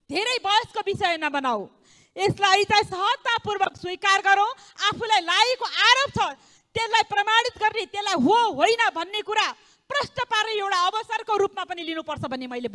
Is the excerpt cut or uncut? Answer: uncut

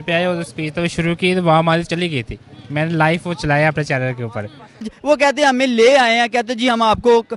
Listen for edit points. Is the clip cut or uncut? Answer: cut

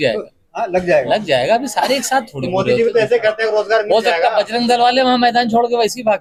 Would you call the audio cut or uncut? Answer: uncut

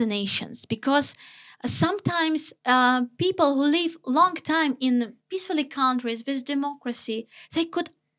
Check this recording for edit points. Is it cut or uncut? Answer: uncut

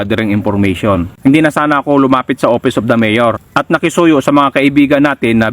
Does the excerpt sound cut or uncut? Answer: cut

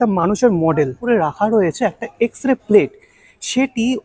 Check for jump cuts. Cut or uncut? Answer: cut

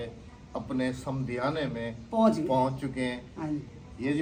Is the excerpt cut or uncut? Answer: uncut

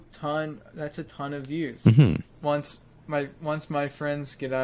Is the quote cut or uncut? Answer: cut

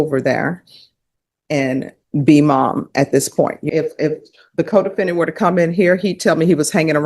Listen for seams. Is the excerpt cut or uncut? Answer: cut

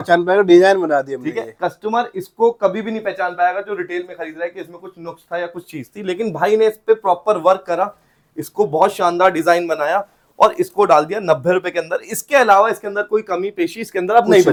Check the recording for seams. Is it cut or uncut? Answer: uncut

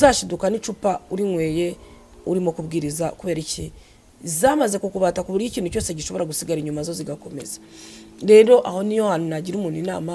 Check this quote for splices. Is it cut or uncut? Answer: uncut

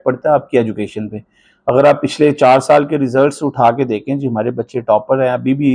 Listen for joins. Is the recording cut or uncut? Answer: uncut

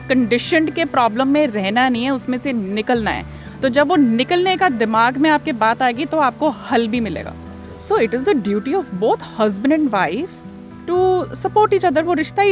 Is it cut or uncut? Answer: cut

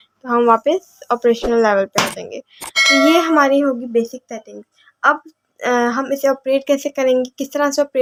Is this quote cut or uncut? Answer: uncut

